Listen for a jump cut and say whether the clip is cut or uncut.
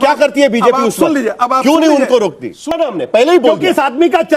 cut